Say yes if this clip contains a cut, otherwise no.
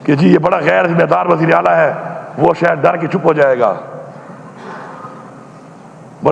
no